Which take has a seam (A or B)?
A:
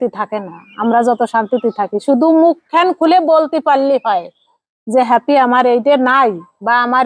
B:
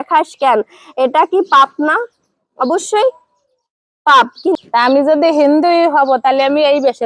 B